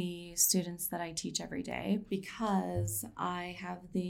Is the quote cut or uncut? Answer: cut